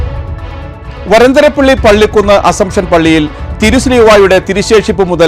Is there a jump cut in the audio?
yes; 1 cut; at 0.9 s

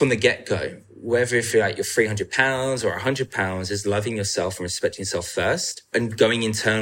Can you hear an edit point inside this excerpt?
yes; 1 cut; at 5.9 s

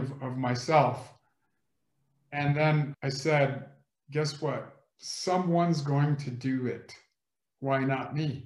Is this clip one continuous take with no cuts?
no; 1 cut; at 2.9 s

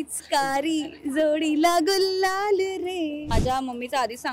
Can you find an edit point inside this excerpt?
yes; 1 cut; at 3.3 s

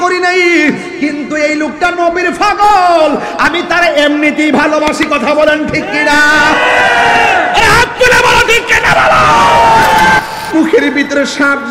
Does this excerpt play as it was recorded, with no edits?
no; 1 cut; at 10.2 s

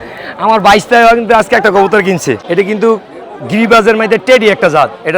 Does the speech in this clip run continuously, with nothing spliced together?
no; 1 cut; at 2.4 s

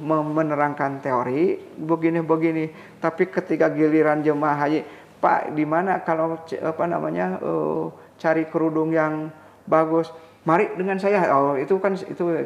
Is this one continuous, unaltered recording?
yes; 0 cuts

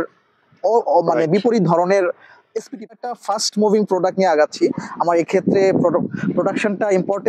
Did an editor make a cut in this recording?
yes; 1 cut; at 2.9 s

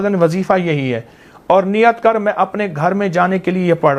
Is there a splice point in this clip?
no; 0 cuts

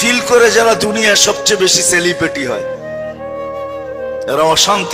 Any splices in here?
no; 0 cuts

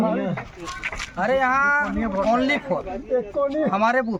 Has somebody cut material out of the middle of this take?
no; 0 cuts

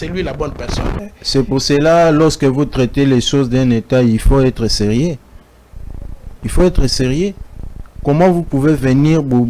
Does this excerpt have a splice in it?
yes; 1 cut; at 1.0 s

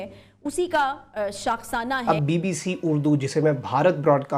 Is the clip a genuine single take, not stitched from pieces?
no; 1 cut; at 2.0 s

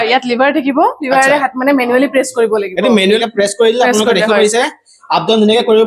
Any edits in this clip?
yes; 1 cut; at 3.2 s

